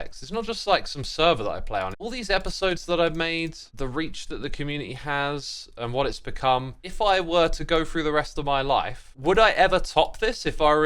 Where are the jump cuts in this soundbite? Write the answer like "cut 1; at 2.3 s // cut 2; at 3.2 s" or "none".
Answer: cut 1; at 9.0 s